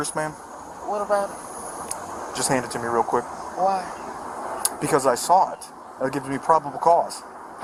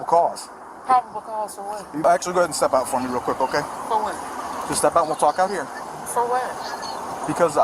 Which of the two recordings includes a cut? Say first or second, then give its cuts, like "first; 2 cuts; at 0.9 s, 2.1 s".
second; 1 cut; at 2.0 s